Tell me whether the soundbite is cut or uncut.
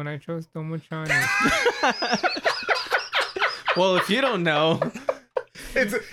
uncut